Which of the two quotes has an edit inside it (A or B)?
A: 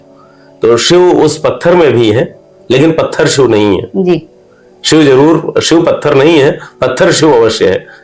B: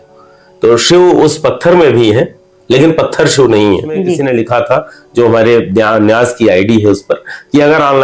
B